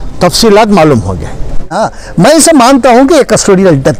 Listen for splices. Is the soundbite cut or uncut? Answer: cut